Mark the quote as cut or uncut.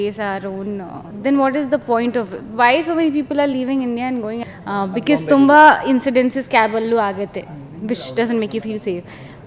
cut